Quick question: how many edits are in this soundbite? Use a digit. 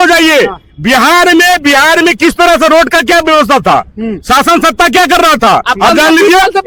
0